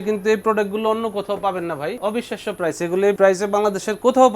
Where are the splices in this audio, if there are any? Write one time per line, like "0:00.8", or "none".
0:02.0
0:03.2